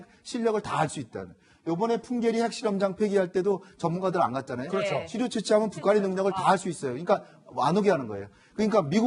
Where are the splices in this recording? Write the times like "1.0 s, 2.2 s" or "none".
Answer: 4.3 s